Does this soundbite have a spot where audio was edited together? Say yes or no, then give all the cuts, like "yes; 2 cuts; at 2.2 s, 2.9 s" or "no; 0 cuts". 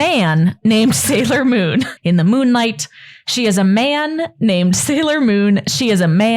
yes; 1 cut; at 1.9 s